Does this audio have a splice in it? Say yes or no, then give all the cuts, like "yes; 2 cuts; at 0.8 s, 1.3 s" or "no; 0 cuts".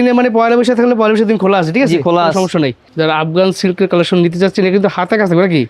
yes; 1 cut; at 2.8 s